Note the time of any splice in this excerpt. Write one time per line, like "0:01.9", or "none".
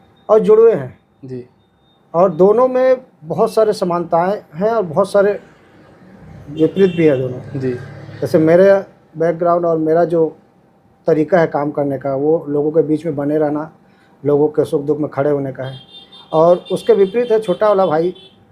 none

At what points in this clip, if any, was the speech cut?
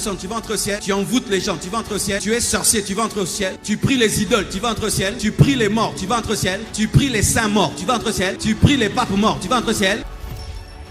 0:00.8
0:02.2
0:03.6
0:05.2
0:06.6
0:08.4

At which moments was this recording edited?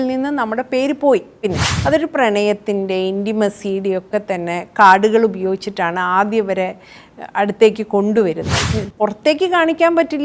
0:01.7
0:08.5

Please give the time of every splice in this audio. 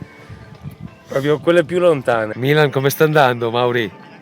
0:02.3

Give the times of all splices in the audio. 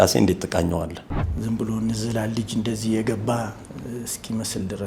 0:01.0

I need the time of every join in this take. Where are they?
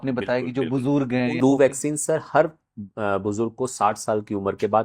0:01.4

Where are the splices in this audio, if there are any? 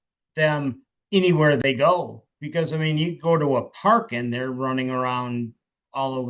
none

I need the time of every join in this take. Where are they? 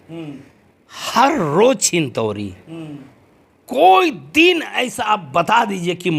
none

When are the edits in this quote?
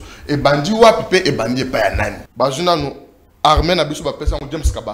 0:02.2

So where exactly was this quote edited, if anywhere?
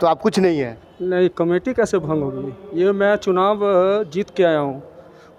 none

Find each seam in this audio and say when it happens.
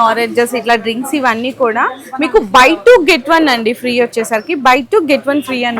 none

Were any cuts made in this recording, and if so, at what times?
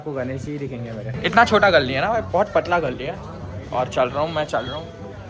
0:01.0

